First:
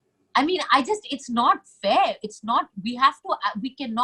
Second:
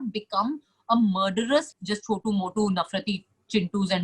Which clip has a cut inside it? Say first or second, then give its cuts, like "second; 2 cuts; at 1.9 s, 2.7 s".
second; 1 cut; at 1.7 s